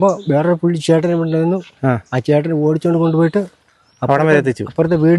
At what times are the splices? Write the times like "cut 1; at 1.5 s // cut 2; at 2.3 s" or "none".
none